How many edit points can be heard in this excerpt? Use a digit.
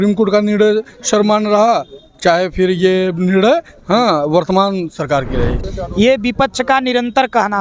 1